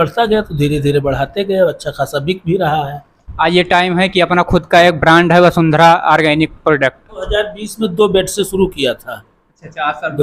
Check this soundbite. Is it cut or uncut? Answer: cut